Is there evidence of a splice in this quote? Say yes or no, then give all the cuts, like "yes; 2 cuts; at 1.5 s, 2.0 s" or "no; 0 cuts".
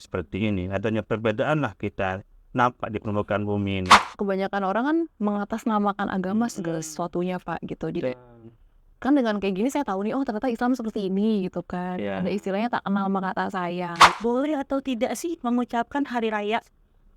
yes; 2 cuts; at 4.0 s, 14.0 s